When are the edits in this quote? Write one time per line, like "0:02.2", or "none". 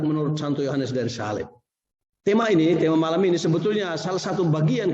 0:02.4